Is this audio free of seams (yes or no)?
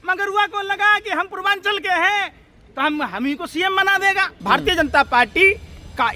no